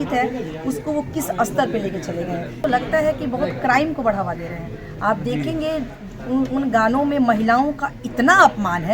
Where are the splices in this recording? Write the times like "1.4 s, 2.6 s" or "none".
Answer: 2.6 s